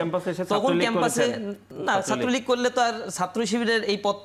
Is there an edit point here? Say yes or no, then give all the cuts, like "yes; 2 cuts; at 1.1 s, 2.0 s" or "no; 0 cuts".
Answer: no; 0 cuts